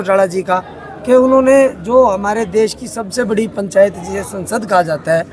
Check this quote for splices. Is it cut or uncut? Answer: uncut